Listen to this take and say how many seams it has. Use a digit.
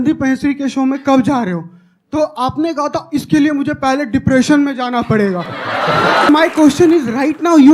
1